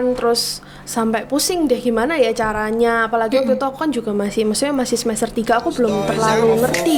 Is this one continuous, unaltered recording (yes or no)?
yes